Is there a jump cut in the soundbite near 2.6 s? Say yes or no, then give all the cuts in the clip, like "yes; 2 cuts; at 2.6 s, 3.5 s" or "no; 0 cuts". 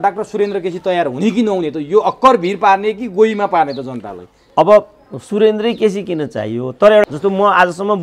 no; 1 cut; at 7.0 s